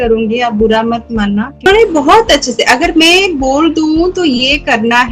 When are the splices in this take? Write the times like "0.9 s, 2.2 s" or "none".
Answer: 1.7 s